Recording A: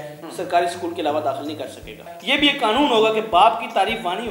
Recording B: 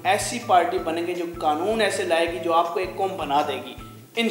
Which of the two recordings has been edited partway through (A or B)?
A